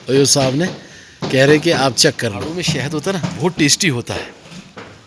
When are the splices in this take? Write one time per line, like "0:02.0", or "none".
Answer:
0:02.4